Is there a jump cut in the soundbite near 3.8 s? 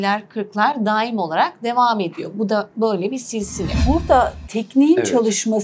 yes; 1 cut; at 3.8 s

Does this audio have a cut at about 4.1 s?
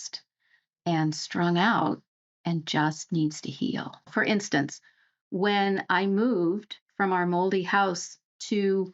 yes; 1 cut; at 4.1 s

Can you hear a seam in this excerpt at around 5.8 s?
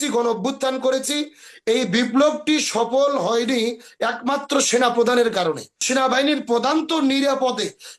yes; 1 cut; at 5.8 s

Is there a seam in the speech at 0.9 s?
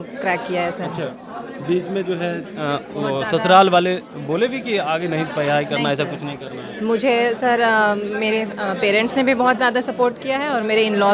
no; 0 cuts

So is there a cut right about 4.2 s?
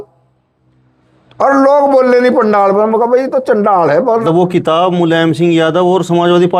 yes; 1 cut; at 4.2 s

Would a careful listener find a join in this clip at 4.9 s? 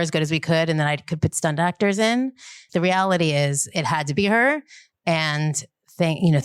no; 1 cut; at 2.6 s

